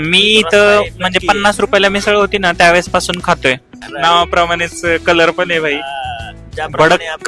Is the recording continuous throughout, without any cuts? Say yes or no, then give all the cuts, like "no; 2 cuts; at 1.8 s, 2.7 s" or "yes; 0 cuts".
no; 1 cut; at 3.7 s